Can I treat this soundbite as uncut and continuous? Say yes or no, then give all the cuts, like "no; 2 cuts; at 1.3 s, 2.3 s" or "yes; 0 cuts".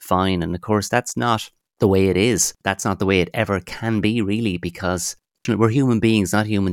no; 2 cuts; at 2.6 s, 5.4 s